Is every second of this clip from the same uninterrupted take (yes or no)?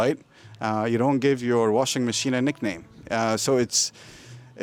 yes